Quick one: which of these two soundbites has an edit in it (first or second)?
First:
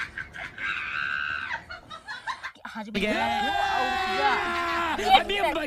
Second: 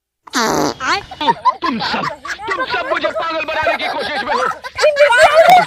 first